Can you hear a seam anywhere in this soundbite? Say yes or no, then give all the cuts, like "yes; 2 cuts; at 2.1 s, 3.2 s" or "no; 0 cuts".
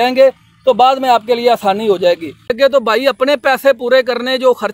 yes; 1 cut; at 2.5 s